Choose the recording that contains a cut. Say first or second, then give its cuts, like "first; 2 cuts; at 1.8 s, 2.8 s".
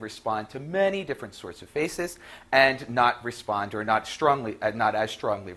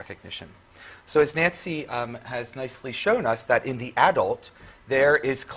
second; 1 cut; at 3.9 s